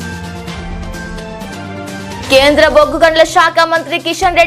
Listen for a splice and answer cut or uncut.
cut